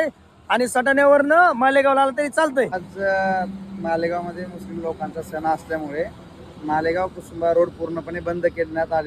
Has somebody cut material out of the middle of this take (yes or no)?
yes